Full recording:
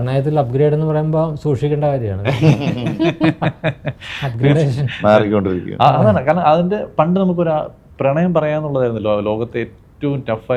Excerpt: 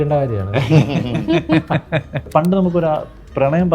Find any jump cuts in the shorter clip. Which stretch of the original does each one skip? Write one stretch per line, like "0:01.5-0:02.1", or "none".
0:04.0-0:06.9